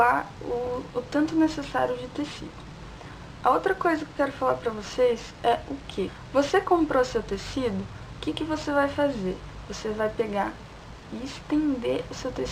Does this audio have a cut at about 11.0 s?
yes; 1 cut; at 11.0 s

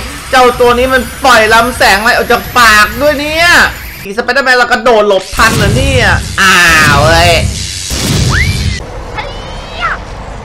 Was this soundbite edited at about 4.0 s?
yes; 2 cuts; at 4.0 s, 9.0 s

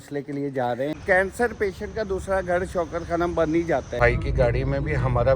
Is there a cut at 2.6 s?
no; 2 cuts; at 0.9 s, 4.0 s

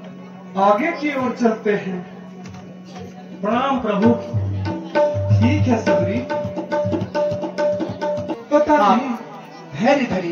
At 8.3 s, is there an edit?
yes; 1 cut; at 8.3 s

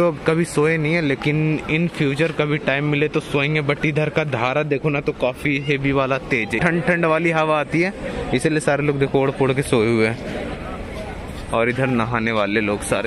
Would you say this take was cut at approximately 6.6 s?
yes; 1 cut; at 6.6 s

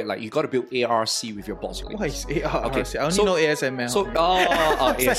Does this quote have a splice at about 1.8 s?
yes; 1 cut; at 1.8 s

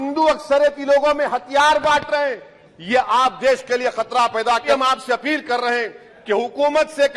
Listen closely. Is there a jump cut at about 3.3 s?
no; 1 cut; at 4.6 s

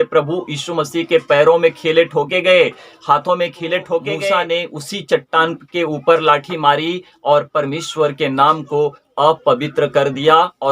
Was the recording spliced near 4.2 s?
yes; 1 cut; at 4.2 s

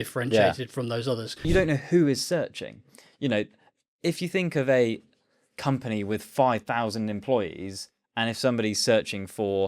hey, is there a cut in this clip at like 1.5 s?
yes; 1 cut; at 1.5 s

